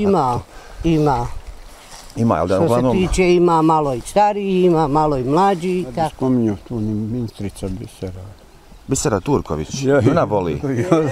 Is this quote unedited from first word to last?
no; 1 cut; at 6.1 s

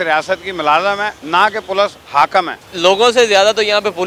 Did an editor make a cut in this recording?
yes; 2 cuts; at 1.1 s, 2.6 s

